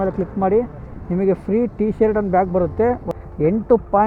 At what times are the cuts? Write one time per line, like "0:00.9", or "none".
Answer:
0:03.1